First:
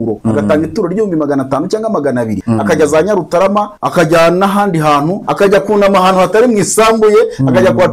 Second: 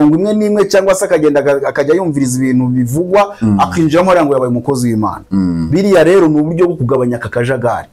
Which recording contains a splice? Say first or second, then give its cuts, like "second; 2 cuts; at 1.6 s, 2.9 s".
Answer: first; 3 cuts; at 2.4 s, 3.8 s, 5.2 s